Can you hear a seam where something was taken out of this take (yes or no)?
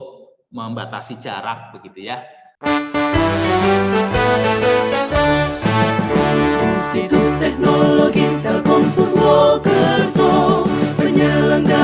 yes